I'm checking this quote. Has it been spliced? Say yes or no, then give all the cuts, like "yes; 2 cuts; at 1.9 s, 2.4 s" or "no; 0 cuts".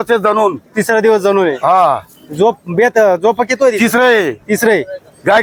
no; 0 cuts